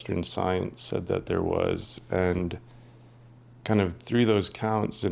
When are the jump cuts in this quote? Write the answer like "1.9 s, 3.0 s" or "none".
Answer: none